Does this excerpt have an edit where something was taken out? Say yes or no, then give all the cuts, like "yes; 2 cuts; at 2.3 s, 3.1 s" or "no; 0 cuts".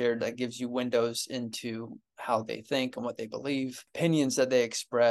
yes; 1 cut; at 3.8 s